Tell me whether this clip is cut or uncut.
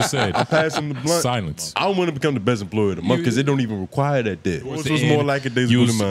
cut